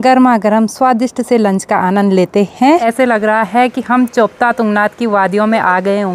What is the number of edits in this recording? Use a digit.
1